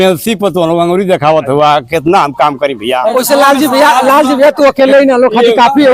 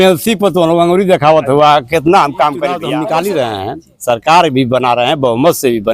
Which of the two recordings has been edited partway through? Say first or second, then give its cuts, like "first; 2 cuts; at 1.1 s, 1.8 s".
second; 1 cut; at 2.8 s